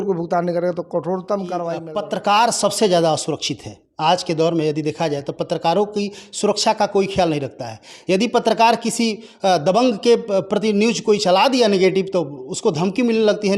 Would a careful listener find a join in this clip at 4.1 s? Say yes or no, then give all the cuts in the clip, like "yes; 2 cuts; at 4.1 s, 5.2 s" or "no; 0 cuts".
no; 1 cut; at 1.8 s